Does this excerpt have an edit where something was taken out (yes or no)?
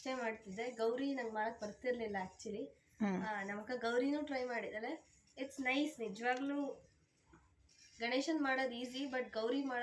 no